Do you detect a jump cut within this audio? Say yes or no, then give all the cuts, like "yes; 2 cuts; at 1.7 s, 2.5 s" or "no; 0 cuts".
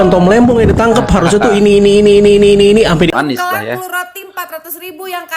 yes; 1 cut; at 3.1 s